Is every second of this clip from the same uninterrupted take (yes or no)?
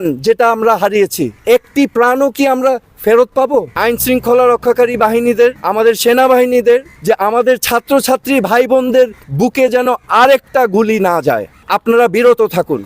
no